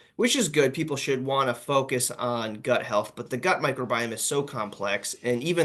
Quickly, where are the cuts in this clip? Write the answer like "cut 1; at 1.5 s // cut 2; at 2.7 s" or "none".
none

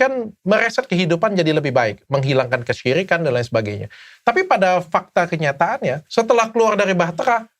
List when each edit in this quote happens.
cut 1; at 6.0 s

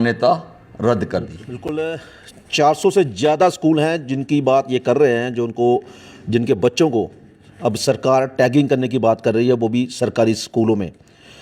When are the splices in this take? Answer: cut 1; at 1.7 s

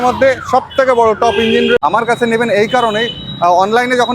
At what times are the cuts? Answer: cut 1; at 1.8 s

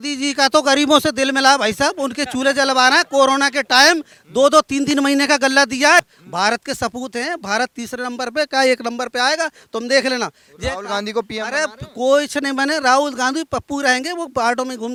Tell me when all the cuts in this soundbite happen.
none

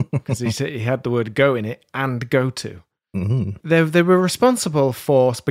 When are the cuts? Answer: cut 1; at 3.6 s

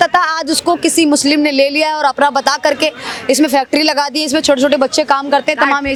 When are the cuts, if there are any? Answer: none

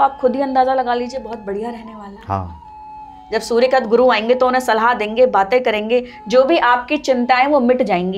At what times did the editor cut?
none

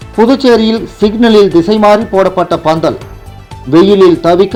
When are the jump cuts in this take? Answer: none

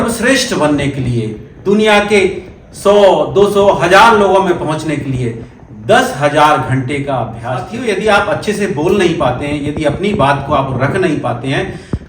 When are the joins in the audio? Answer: cut 1; at 7.7 s

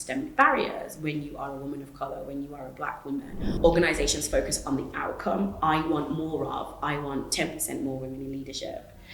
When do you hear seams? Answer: cut 1; at 3.4 s

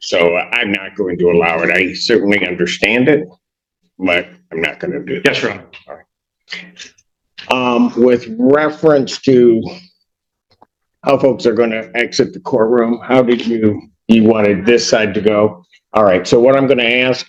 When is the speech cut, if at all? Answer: none

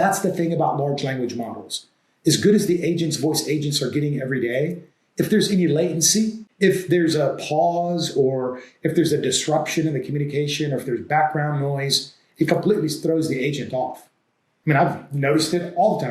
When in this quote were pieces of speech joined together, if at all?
cut 1; at 6.4 s

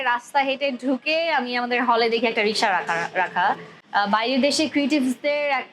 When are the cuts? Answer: cut 1; at 3.7 s

